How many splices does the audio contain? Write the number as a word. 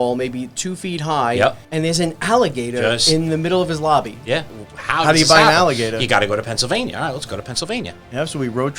two